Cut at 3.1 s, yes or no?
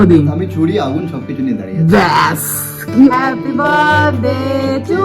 yes